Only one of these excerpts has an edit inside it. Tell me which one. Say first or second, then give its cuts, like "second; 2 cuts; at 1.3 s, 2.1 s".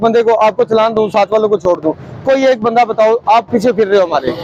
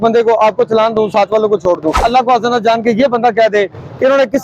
second; 1 cut; at 2.0 s